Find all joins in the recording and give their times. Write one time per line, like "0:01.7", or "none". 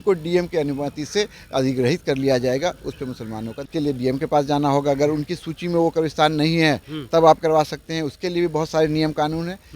0:03.6